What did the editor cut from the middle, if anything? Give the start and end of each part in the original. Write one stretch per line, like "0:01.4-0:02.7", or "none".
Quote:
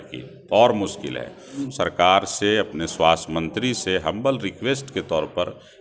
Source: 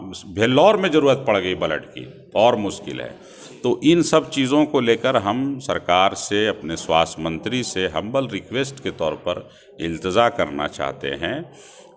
0:03.5-0:05.5